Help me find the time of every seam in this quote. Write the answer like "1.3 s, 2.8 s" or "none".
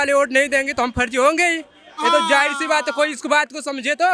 none